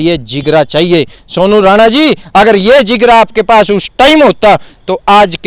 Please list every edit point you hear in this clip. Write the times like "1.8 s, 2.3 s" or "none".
none